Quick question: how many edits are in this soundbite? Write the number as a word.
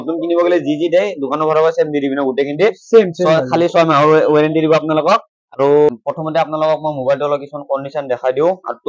one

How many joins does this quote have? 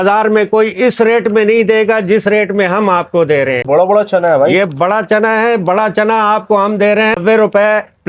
two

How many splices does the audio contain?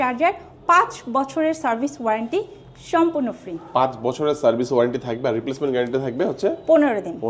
zero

